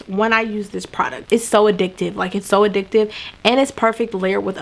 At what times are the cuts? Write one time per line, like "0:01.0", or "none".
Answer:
0:01.2

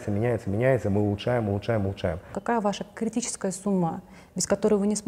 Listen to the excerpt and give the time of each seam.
0:02.3

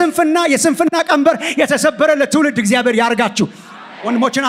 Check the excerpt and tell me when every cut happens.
none

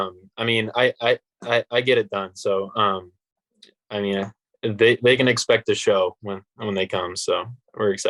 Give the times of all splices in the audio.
none

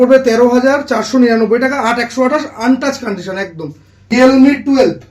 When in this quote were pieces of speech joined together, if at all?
0:04.1

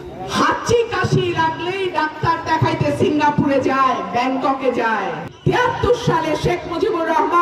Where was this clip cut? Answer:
0:05.2

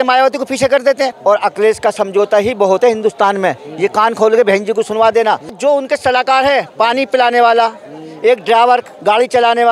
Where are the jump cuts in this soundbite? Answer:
0:01.2
0:05.6

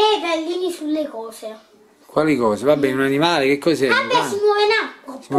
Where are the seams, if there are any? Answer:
none

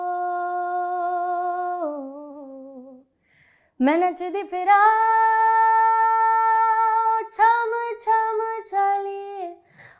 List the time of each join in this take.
none

